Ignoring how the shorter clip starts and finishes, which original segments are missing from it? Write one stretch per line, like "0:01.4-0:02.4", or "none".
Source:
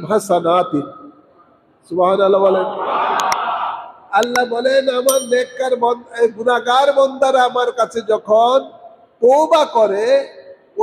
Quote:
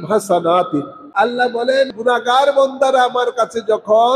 0:01.0-0:04.0
0:04.9-0:06.3